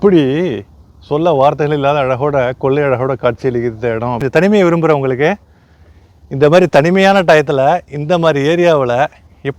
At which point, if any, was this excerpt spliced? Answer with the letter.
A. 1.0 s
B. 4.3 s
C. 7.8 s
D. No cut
B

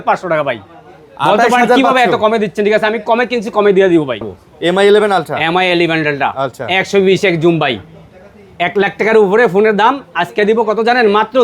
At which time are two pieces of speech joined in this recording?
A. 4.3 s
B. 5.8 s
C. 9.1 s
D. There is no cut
A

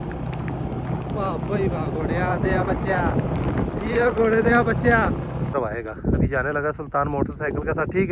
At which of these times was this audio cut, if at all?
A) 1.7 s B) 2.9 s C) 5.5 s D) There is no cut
C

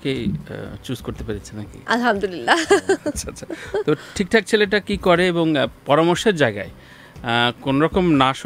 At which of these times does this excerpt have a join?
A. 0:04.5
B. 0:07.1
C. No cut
C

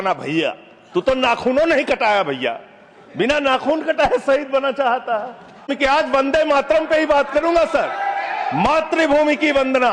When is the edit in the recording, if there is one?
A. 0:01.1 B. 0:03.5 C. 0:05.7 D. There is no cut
C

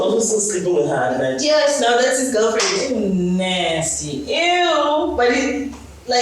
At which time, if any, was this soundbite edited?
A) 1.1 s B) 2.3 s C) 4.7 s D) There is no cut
D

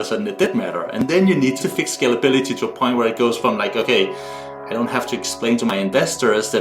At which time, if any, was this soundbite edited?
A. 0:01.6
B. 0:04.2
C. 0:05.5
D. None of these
A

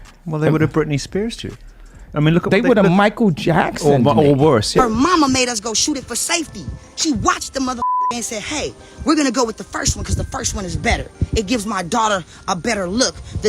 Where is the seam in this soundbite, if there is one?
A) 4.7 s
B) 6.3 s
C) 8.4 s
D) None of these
A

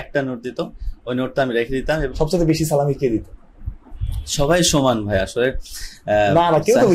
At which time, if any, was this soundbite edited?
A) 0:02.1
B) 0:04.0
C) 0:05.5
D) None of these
A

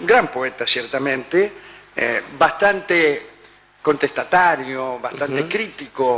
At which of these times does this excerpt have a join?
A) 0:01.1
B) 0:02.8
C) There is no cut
C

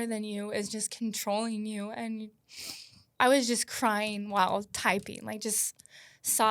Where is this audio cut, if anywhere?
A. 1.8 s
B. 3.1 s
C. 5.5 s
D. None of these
B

